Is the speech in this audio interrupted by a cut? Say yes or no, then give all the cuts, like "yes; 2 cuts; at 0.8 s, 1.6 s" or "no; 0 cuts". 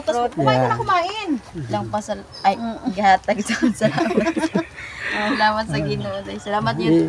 yes; 1 cut; at 1.6 s